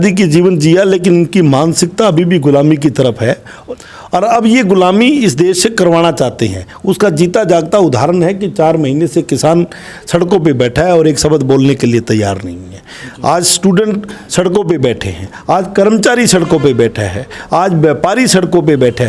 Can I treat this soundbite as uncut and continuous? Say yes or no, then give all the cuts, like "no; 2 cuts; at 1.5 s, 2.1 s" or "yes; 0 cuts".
no; 1 cut; at 3.5 s